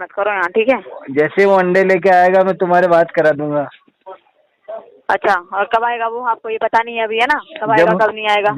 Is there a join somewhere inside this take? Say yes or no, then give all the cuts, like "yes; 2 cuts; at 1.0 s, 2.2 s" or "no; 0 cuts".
no; 0 cuts